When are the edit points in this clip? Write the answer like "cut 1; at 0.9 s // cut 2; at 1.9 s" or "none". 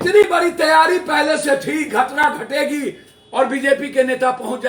none